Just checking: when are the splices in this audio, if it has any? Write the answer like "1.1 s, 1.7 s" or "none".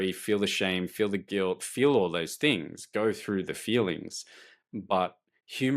none

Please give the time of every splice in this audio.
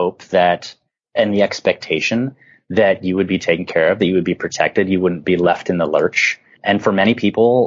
6.5 s

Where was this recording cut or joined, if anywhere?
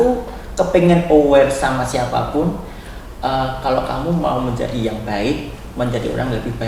none

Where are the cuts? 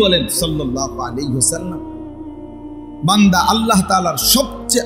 1.7 s, 3.0 s

